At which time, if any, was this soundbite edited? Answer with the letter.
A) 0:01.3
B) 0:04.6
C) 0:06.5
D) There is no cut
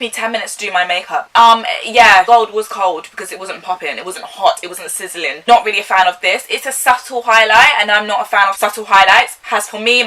A